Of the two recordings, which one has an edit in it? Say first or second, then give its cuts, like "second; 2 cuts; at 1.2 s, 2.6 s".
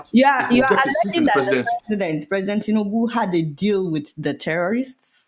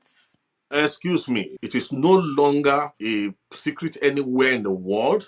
second; 2 cuts; at 1.6 s, 2.9 s